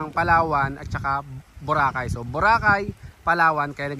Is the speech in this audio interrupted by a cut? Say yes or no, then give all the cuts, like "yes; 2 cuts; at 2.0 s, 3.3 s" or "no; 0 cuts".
no; 0 cuts